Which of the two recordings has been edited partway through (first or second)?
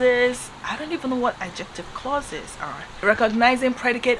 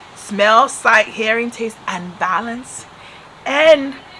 first